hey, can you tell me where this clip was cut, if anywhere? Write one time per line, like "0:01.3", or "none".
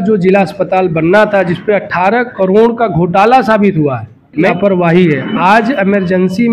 0:04.5